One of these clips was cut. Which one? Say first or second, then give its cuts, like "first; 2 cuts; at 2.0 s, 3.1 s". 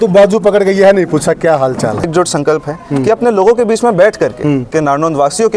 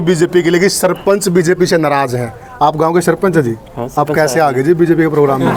first; 2 cuts; at 2.1 s, 4.7 s